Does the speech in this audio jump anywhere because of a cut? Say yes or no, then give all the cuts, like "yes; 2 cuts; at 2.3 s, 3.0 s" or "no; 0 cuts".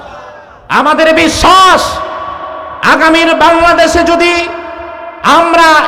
no; 0 cuts